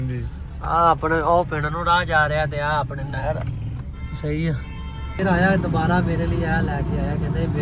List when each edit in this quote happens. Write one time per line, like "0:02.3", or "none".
0:05.2